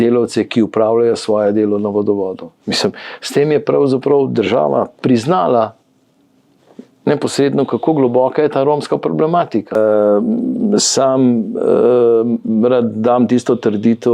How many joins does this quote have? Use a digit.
1